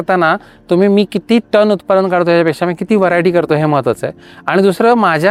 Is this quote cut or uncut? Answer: uncut